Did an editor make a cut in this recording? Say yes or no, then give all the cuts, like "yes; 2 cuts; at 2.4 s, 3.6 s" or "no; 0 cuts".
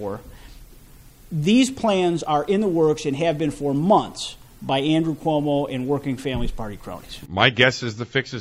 yes; 1 cut; at 7.1 s